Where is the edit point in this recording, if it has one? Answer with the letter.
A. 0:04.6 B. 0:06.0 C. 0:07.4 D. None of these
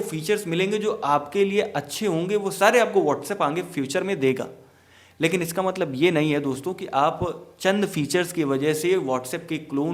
D